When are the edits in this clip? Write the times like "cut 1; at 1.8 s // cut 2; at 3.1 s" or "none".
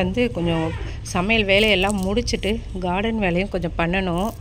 none